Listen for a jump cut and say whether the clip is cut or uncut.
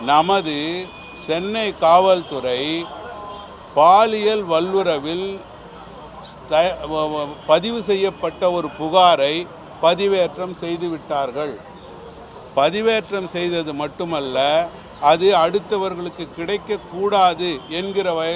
uncut